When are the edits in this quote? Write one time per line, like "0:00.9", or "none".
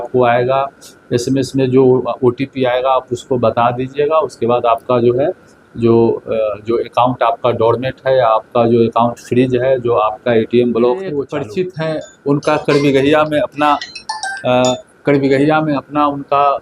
0:11.3